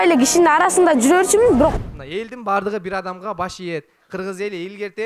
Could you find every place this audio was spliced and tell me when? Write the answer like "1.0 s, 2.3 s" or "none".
1.8 s